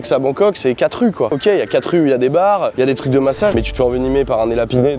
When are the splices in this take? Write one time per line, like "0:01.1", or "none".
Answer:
0:01.3
0:03.5